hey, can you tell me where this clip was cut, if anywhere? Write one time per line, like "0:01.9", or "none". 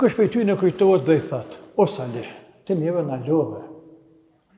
none